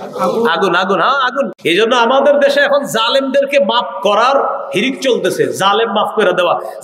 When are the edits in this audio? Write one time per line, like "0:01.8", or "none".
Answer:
0:01.5